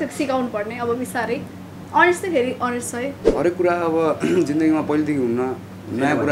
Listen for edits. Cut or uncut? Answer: cut